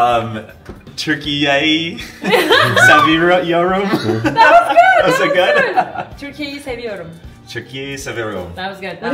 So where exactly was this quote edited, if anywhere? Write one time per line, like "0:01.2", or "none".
none